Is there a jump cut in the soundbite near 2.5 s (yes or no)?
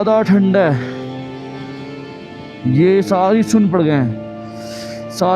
yes